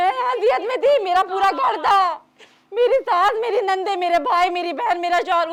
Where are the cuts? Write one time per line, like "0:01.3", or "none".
none